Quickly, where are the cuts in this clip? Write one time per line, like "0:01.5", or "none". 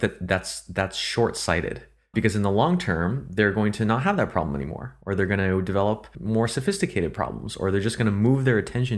0:02.1
0:06.1